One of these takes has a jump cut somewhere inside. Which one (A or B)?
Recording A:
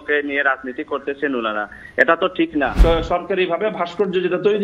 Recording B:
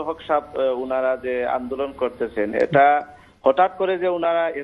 A